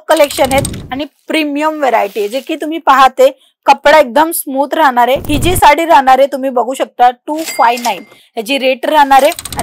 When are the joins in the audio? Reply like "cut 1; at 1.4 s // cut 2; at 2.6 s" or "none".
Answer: cut 1; at 5.2 s